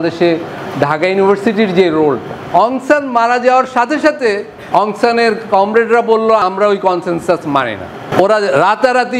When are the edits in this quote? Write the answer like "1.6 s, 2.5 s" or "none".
2.3 s, 4.5 s, 6.4 s, 8.1 s